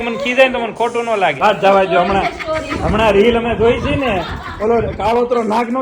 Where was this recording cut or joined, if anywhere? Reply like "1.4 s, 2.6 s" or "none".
1.4 s